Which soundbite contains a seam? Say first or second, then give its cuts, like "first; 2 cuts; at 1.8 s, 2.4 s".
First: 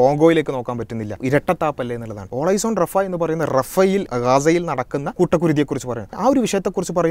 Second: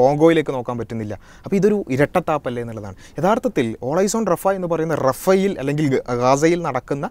first; 5 cuts; at 1.2 s, 2.3 s, 4.1 s, 5.1 s, 6.2 s